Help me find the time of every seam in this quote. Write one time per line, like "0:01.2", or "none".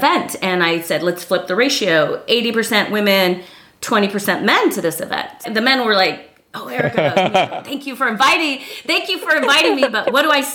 0:05.5